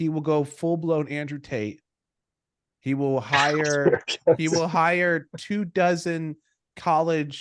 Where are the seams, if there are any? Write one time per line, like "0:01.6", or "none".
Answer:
none